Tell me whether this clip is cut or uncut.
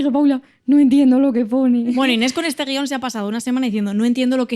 cut